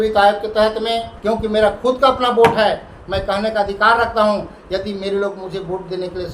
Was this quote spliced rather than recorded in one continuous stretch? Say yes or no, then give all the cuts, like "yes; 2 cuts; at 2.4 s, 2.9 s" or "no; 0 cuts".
yes; 1 cut; at 1.1 s